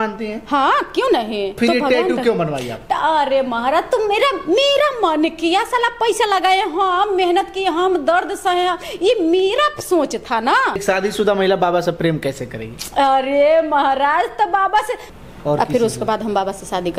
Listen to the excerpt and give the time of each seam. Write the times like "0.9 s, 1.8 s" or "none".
1.5 s, 10.8 s, 15.0 s